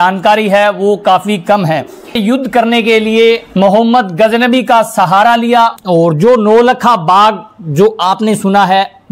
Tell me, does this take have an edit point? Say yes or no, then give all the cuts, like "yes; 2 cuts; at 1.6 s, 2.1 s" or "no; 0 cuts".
yes; 2 cuts; at 2.2 s, 5.8 s